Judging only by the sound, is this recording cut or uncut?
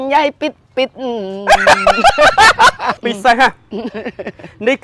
cut